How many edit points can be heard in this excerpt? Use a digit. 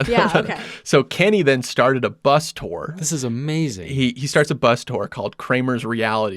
1